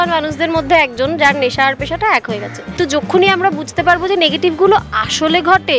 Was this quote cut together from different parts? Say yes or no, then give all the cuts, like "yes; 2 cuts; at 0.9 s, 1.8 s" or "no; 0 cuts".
yes; 1 cut; at 2.6 s